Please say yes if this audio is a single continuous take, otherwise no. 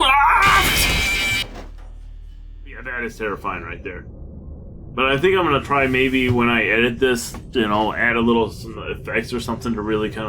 no